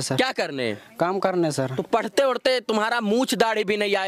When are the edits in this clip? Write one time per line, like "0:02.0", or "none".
none